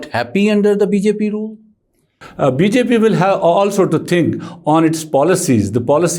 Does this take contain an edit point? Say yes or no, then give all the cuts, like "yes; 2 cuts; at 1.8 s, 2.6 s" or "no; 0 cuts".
yes; 1 cut; at 2.2 s